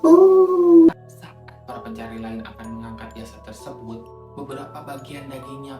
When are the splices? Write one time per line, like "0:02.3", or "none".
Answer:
0:01.0